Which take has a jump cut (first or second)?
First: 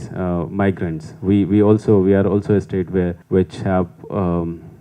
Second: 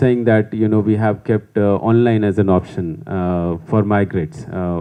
first